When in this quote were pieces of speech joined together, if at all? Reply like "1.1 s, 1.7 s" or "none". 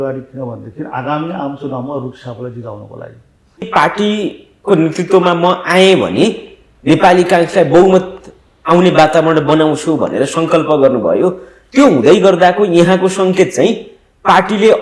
3.6 s

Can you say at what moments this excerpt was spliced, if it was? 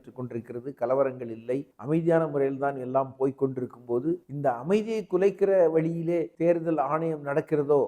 1.7 s, 4.3 s, 6.3 s

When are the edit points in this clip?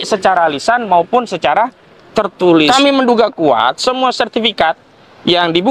2.7 s

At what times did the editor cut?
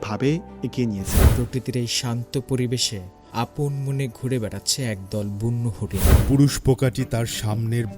1.2 s, 6.2 s

